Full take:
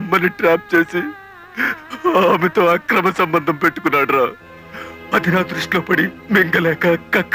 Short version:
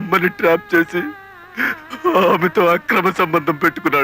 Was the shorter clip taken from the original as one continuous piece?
yes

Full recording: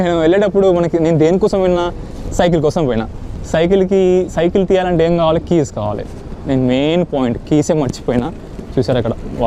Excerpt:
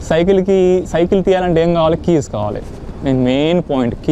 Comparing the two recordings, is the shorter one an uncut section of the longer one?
yes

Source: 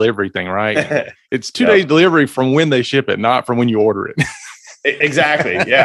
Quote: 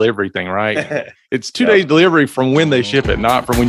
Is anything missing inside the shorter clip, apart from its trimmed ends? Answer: no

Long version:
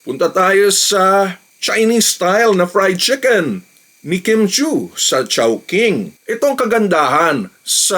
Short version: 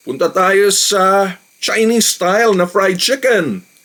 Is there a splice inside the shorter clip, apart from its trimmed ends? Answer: no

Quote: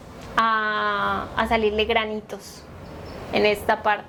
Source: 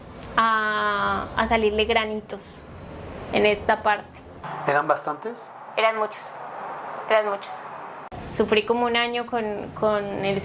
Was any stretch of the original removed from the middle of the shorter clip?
no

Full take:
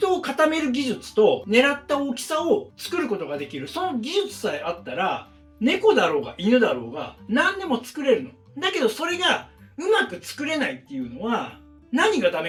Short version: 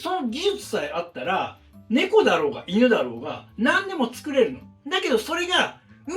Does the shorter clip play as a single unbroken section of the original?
yes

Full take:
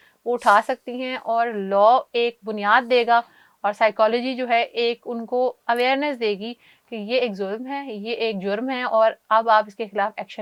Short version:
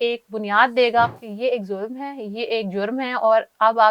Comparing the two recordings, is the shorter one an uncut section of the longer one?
no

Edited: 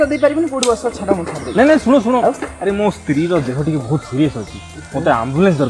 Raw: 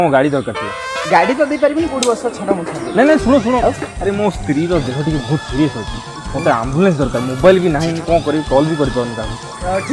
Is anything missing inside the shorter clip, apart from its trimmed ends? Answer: no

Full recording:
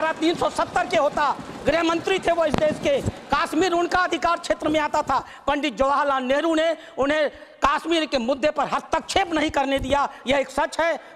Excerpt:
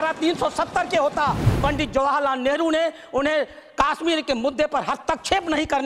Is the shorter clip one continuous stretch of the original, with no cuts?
no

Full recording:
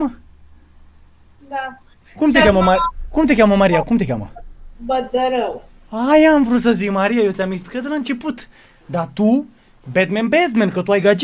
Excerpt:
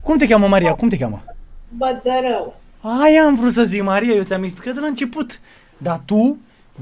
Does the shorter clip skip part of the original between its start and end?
no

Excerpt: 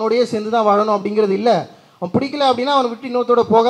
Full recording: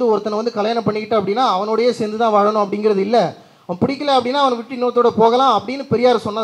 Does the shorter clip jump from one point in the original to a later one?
no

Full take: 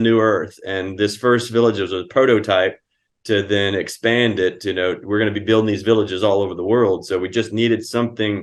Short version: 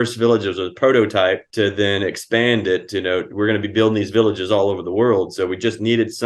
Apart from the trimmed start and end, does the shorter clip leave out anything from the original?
yes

